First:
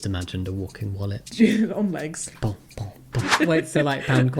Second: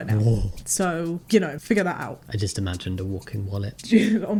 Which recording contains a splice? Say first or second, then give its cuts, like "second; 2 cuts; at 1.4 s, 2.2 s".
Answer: first; 1 cut; at 3.3 s